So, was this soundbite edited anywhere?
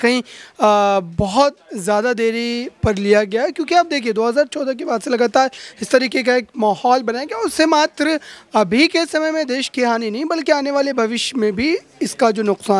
no; 0 cuts

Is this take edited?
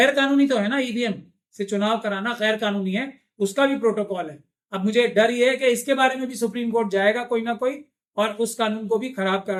no; 0 cuts

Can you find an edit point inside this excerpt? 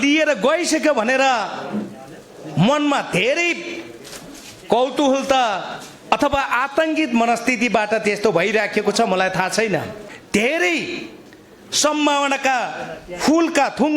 yes; 1 cut; at 10.1 s

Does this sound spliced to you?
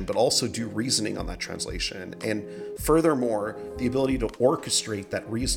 no; 0 cuts

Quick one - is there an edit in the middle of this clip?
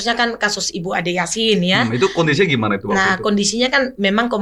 no; 0 cuts

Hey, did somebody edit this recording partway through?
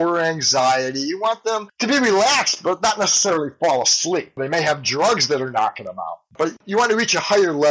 yes; 1 cut; at 6.6 s

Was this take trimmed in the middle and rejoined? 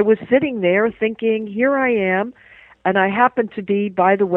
no; 0 cuts

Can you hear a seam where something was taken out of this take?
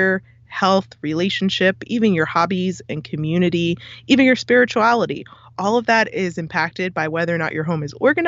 no; 0 cuts

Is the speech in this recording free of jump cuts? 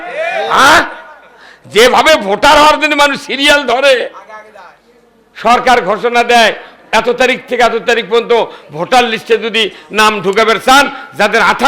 yes; 0 cuts

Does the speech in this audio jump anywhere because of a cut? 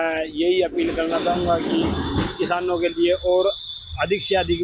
no; 0 cuts

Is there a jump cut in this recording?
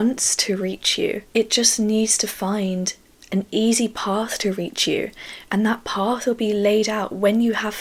no; 0 cuts

